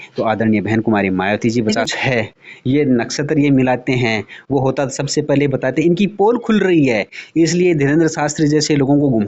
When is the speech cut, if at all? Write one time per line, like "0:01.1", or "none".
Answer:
0:01.9